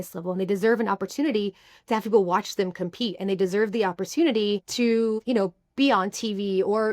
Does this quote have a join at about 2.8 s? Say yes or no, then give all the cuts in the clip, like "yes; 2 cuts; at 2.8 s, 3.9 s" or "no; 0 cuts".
no; 1 cut; at 4.9 s